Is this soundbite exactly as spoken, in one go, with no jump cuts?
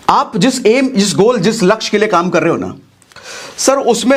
yes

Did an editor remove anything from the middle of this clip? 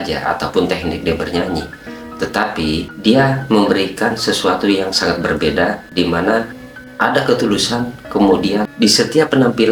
no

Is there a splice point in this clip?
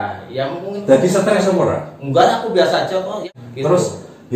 yes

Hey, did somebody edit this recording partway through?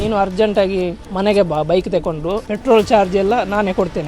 yes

